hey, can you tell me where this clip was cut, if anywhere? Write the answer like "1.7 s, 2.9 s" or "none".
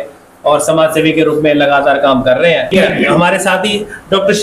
2.7 s

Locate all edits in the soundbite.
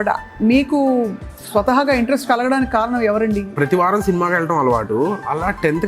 3.5 s

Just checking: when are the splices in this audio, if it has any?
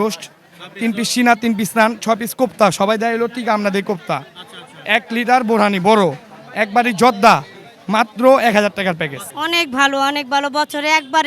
9.2 s

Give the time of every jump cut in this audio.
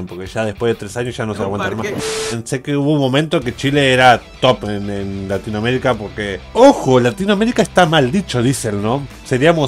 2.0 s, 6.4 s

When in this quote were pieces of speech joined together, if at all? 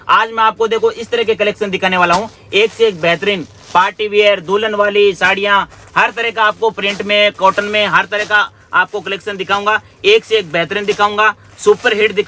none

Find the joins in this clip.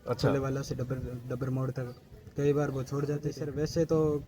3.4 s

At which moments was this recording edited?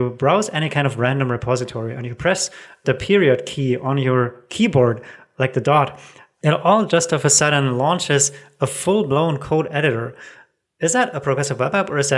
none

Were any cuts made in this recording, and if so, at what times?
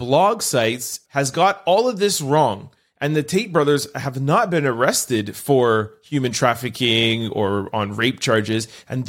1.0 s

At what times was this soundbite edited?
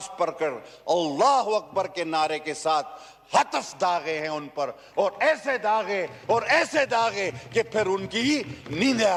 none

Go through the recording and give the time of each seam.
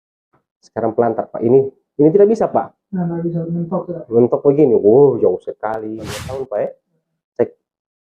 6.2 s

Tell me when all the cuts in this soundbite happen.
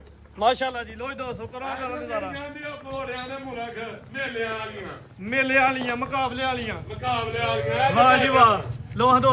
none

